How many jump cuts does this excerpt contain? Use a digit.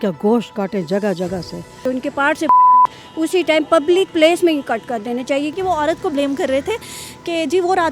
2